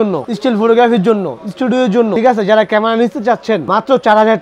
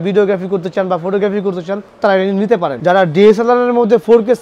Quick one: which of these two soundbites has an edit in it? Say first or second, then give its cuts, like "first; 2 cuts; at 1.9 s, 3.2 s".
second; 1 cut; at 2.8 s